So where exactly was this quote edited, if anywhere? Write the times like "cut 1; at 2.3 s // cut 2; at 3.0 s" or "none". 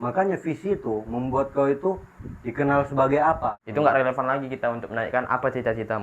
cut 1; at 3.4 s